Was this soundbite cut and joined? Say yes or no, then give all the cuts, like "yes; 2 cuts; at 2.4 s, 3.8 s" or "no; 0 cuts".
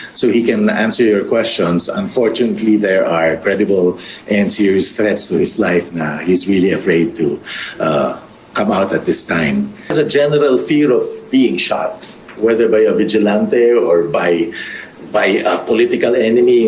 no; 0 cuts